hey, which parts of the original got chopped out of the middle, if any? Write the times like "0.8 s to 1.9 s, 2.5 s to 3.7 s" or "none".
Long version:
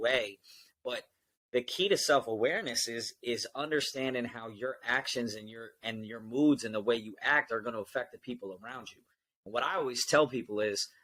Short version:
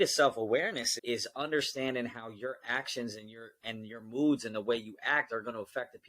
2.8 s to 3.1 s